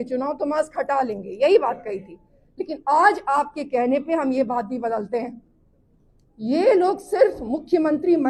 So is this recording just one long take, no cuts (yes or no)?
yes